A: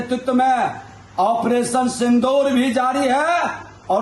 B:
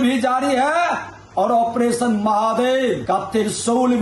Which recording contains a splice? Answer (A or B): B